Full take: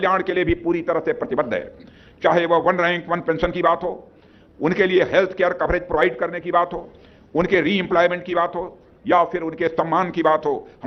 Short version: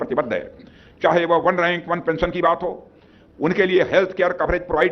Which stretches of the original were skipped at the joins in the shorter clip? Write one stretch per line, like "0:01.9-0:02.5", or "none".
none